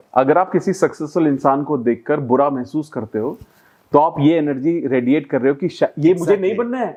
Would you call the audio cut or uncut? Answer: uncut